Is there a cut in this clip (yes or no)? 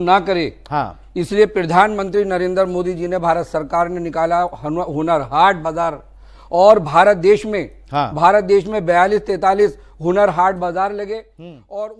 no